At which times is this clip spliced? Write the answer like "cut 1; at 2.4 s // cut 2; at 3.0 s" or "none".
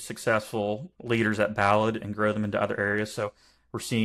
cut 1; at 0.9 s